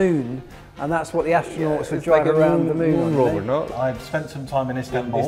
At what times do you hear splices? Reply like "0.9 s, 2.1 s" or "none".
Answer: 3.7 s